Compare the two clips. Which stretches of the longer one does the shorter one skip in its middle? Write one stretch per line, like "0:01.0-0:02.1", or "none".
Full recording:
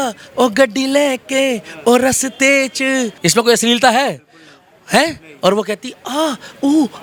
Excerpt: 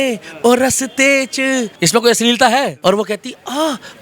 0:04.2-0:05.3